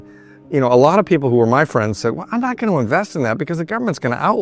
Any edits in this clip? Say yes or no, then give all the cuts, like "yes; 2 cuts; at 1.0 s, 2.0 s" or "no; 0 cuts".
no; 0 cuts